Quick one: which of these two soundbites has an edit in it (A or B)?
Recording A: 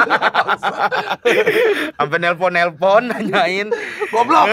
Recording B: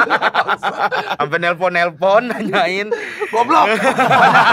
B